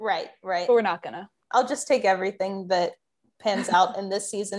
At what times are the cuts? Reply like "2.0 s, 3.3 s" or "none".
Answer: 1.4 s